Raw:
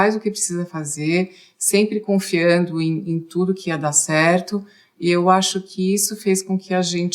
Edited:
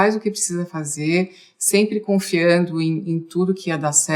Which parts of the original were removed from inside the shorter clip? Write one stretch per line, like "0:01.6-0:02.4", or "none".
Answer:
none

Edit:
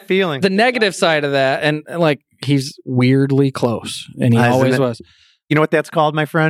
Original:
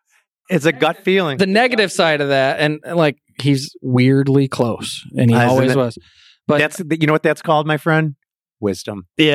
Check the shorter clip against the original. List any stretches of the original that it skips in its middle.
0:06.4-0:07.0

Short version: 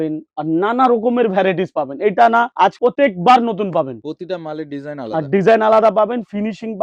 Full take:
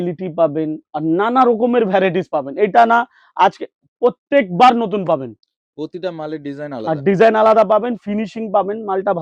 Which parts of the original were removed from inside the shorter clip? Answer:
0:03.4-0:04.1
0:05.4-0:05.8

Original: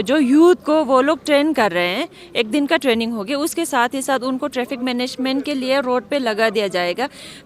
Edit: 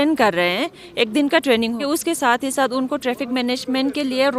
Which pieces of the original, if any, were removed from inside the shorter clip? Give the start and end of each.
0:03.2-0:03.3

